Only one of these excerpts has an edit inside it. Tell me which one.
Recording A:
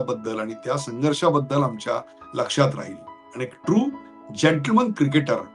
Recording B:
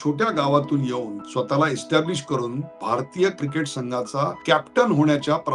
B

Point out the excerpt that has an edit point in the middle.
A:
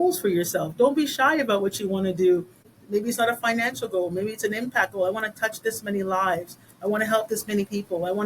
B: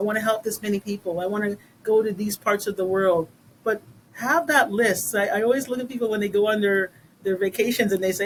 A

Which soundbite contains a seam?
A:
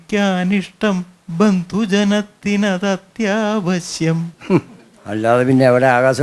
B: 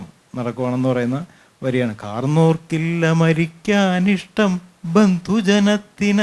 A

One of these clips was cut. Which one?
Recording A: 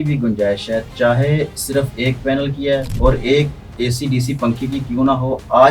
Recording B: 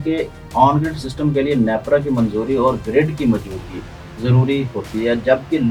A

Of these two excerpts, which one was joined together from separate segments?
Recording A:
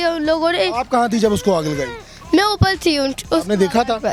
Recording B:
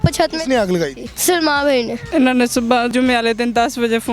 B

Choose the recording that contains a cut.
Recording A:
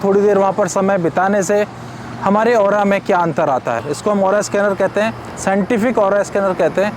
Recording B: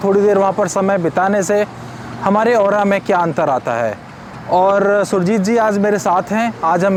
A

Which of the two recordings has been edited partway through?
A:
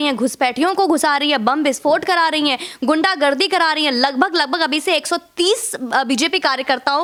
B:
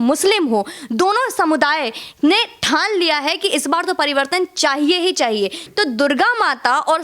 B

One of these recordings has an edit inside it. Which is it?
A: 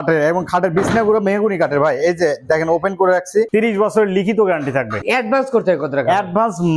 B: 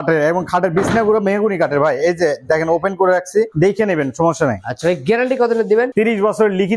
A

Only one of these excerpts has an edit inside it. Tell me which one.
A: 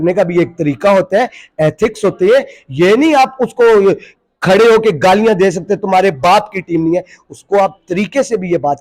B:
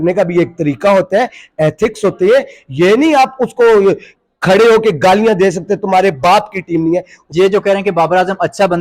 B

